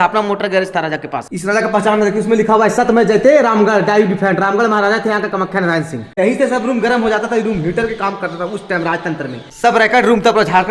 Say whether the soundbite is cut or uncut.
cut